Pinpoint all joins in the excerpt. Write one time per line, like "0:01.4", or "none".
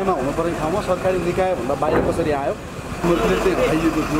0:03.0

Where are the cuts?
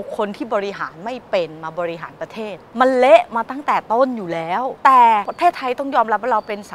0:02.6
0:04.7
0:05.3

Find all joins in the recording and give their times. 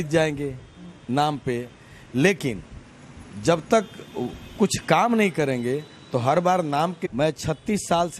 0:07.0

